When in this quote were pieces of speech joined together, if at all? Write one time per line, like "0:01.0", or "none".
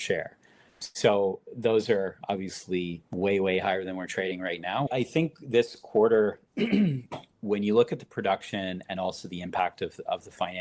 0:04.9